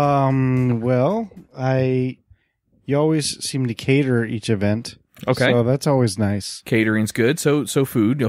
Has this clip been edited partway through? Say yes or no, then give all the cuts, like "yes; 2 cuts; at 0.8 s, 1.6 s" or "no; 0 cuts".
no; 0 cuts